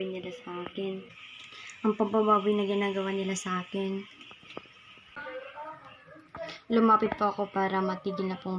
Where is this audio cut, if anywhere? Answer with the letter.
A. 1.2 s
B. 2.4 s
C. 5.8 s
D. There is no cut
D